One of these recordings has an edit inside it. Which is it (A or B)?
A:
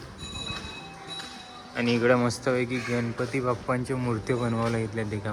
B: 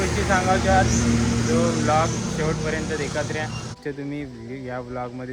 B